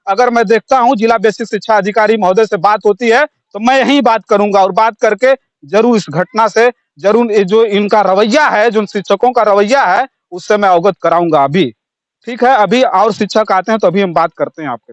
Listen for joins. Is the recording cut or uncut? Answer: uncut